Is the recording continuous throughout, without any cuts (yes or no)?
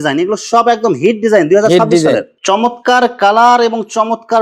no